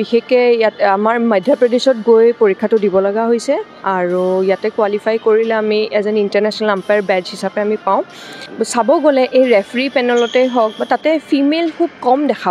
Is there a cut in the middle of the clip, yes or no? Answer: yes